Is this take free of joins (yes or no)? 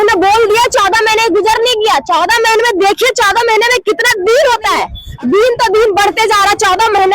no